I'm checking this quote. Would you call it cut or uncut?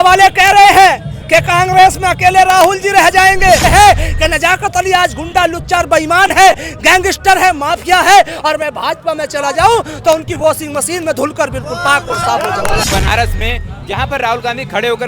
cut